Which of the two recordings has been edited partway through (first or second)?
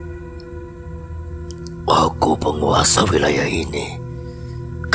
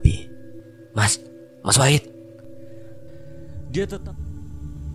second